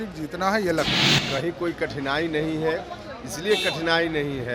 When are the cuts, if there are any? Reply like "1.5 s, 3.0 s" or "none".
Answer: 1.0 s